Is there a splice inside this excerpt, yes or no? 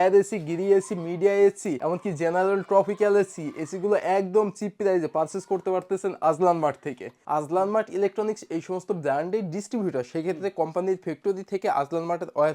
yes